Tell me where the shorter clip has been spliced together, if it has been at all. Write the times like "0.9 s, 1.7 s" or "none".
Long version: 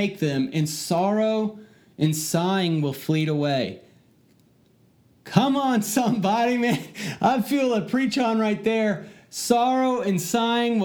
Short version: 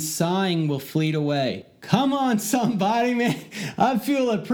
1.7 s